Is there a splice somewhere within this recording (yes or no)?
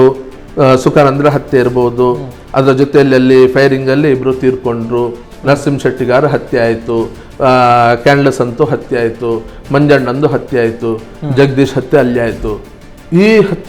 no